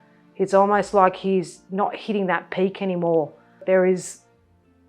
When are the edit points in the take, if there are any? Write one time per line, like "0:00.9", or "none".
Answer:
0:03.6